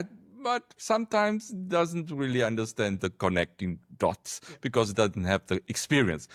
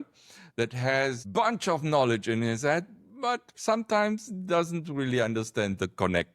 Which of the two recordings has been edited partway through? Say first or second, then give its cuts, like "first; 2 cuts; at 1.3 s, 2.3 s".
second; 1 cut; at 1.2 s